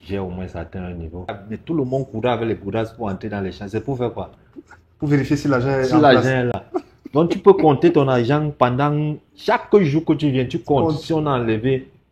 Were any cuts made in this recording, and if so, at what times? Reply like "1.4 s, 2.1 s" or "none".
1.5 s